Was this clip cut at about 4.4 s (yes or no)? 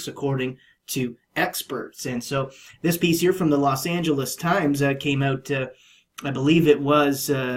no